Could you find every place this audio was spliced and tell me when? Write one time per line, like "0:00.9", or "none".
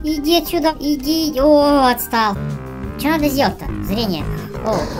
0:02.4

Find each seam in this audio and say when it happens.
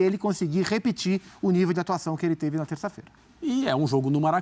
0:03.1

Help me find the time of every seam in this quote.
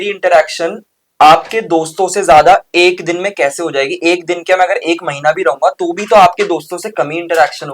none

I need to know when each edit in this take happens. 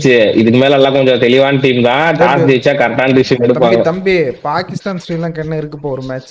none

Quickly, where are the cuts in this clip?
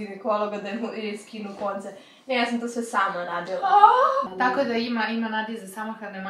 0:04.2

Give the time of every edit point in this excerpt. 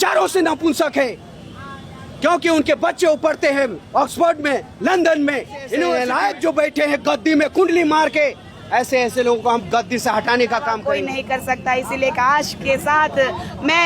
0:05.9
0:10.9

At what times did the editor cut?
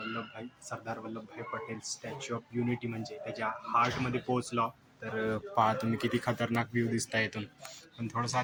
none

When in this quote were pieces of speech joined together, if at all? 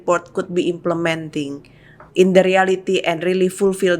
0:02.0

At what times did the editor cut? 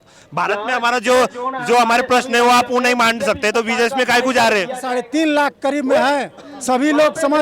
0:04.8

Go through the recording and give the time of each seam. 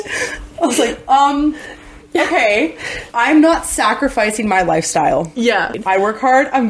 0:05.8

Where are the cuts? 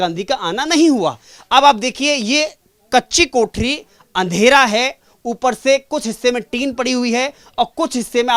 none

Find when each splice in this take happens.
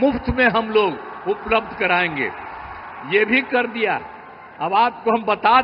none

